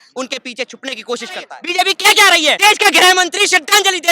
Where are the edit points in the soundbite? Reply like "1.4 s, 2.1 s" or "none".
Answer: 1.6 s, 2.6 s